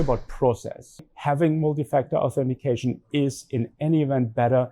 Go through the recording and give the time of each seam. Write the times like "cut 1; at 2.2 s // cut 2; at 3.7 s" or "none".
cut 1; at 1.1 s